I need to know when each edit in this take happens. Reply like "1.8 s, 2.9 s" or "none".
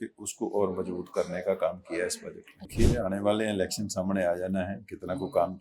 2.7 s